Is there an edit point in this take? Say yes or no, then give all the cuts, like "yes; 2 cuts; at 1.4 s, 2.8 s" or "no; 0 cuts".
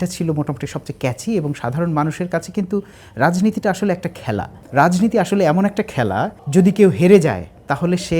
yes; 2 cuts; at 4.6 s, 6.4 s